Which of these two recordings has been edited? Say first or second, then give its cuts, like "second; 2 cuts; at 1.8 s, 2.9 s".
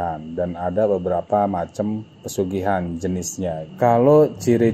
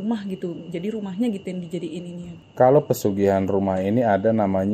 first; 1 cut; at 3.7 s